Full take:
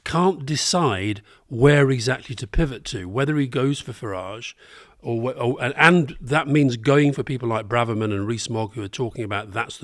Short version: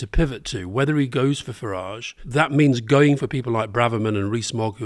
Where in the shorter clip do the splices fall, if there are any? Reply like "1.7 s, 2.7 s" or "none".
2.2 s